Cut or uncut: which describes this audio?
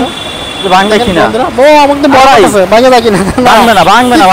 uncut